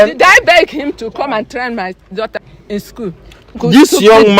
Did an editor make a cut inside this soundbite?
yes; 2 cuts; at 2.4 s, 3.6 s

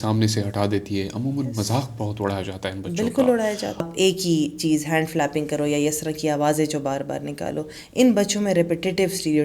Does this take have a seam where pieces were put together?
yes; 1 cut; at 3.9 s

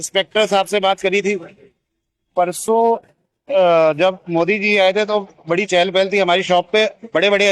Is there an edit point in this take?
no; 0 cuts

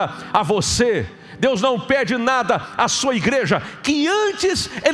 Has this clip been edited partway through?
no; 0 cuts

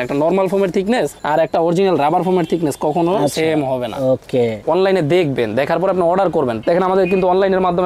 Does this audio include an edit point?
yes; 2 cuts; at 4.6 s, 6.6 s

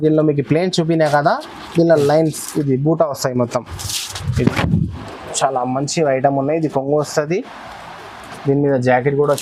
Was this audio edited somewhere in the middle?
no; 0 cuts

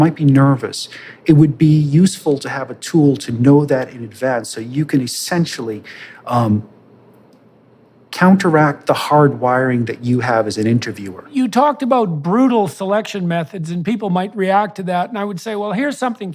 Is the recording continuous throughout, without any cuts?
no; 1 cut; at 11.3 s

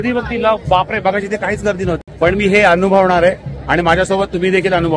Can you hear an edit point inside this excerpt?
yes; 1 cut; at 2.0 s

